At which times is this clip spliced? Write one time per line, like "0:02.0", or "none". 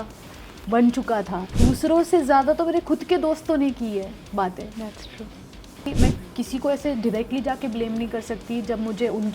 0:01.4
0:05.9